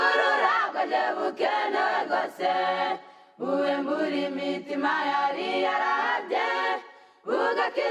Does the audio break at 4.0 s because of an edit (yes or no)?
no